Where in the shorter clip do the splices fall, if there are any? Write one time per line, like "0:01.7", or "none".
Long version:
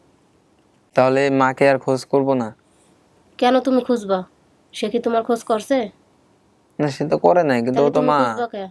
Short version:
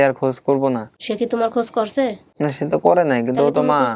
0:01.0
0:02.2